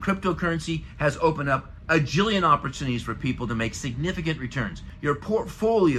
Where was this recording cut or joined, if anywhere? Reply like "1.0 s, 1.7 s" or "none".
4.9 s